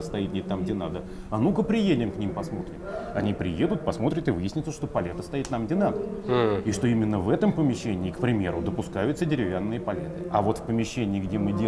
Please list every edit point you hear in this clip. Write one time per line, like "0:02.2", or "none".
none

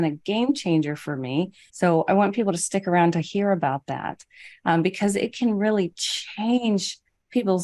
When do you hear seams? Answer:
0:01.6

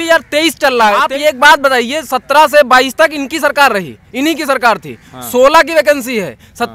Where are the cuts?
0:01.0

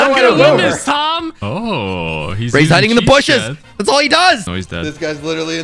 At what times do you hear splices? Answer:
0:01.3
0:04.4

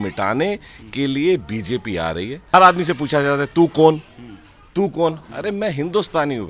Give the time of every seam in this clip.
0:02.4

